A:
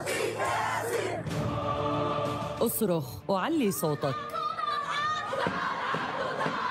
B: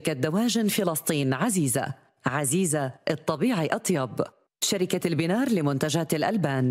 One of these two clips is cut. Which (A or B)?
A